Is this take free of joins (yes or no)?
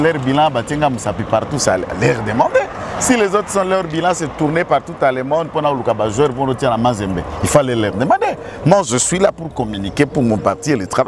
yes